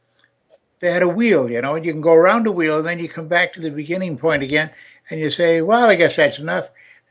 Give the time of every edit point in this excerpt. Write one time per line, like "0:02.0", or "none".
0:02.3